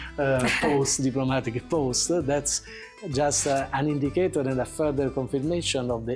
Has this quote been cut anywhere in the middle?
no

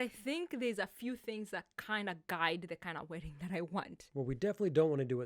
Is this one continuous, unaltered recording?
no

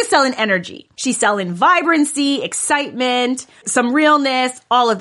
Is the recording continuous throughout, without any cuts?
no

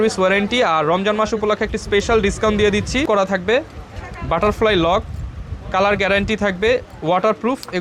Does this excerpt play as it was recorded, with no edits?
no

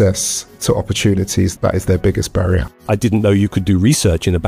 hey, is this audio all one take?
no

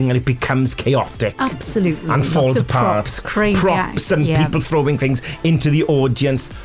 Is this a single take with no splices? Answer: yes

